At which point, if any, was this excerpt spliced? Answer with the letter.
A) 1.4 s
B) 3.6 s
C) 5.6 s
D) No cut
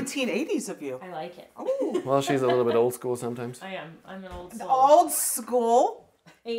D